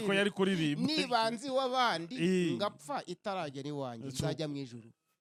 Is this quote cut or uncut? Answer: uncut